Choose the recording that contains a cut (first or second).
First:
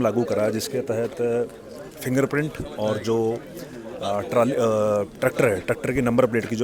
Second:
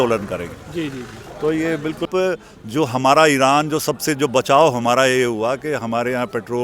second